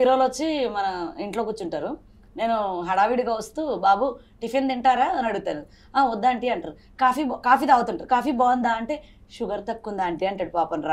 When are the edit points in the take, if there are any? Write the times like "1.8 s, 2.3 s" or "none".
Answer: none